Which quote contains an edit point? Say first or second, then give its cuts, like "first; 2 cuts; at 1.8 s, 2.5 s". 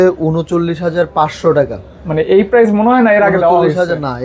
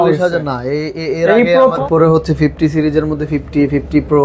second; 1 cut; at 1.8 s